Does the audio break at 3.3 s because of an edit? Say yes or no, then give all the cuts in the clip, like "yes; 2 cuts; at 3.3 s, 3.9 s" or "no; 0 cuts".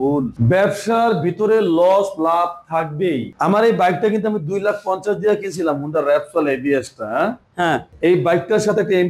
no; 0 cuts